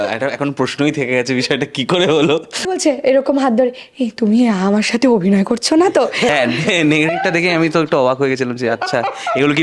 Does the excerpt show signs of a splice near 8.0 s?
no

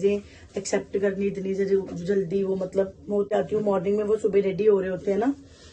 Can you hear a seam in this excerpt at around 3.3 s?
yes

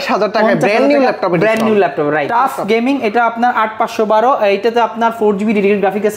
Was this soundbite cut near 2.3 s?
yes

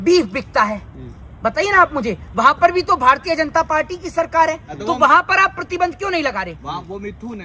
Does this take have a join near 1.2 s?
no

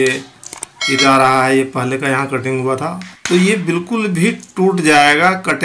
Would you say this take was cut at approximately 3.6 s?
no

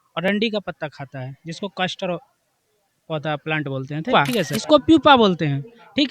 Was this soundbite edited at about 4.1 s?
yes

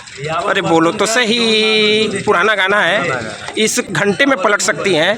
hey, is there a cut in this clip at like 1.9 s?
no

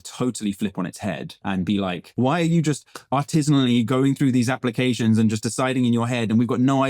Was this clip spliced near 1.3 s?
yes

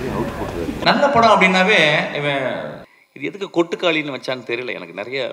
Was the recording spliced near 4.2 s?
no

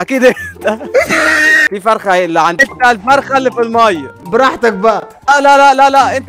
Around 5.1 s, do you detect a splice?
yes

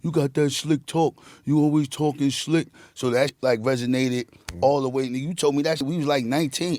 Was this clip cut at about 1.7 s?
no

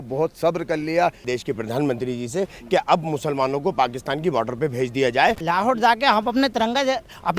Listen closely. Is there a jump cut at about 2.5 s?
no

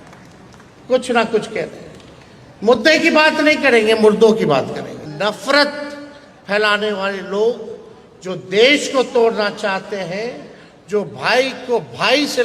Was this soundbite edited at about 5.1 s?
yes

